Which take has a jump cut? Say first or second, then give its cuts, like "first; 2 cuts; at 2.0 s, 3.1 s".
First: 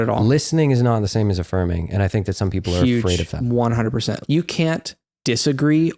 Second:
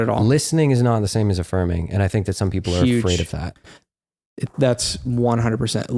first; 2 cuts; at 3.3 s, 4.2 s